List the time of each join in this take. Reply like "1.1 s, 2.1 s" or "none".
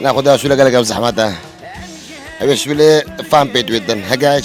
none